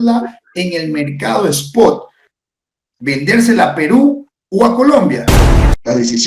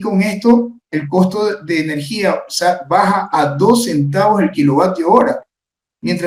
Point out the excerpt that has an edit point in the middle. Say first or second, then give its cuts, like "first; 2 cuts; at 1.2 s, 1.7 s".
first; 1 cut; at 5.3 s